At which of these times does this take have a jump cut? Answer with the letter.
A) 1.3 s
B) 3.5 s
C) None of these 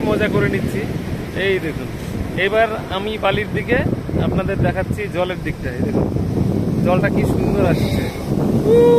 C